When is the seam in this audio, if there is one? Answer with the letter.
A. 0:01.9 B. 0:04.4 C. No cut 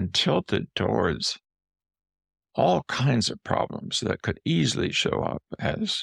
C